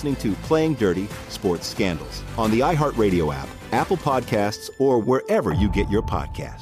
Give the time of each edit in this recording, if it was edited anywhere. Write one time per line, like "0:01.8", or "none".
none